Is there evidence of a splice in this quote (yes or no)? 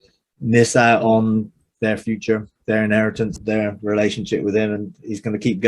yes